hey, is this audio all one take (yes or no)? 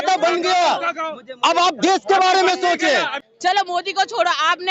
no